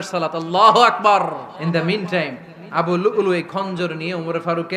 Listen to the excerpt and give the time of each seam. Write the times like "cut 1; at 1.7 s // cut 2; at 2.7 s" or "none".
cut 1; at 1.5 s